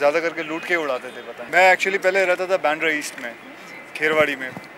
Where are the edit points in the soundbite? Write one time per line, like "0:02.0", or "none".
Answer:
0:01.3